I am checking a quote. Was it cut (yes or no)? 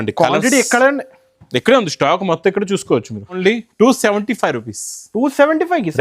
yes